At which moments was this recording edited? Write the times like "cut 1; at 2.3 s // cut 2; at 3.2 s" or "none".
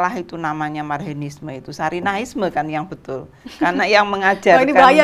none